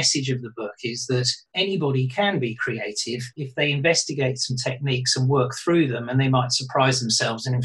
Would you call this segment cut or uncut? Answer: cut